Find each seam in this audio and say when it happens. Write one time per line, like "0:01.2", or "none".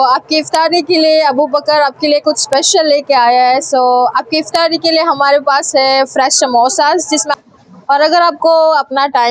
0:07.3